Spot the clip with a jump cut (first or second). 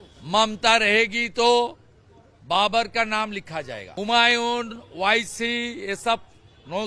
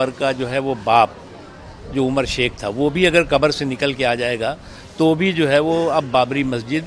first